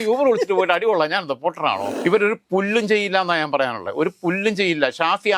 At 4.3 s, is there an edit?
no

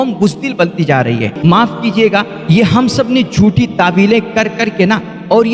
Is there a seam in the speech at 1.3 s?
yes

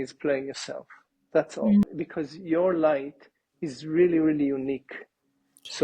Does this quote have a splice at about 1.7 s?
yes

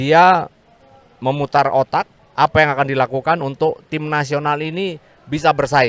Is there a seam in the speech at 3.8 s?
no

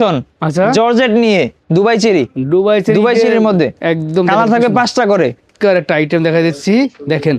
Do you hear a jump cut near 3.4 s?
no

